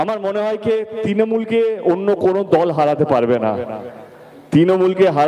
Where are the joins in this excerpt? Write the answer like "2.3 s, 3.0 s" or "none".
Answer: none